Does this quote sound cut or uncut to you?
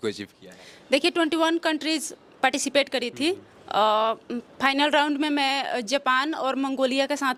uncut